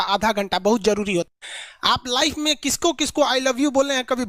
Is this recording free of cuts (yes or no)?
no